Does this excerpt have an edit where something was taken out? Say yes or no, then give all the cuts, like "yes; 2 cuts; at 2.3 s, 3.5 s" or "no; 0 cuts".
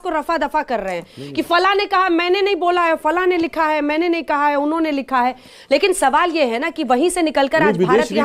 no; 0 cuts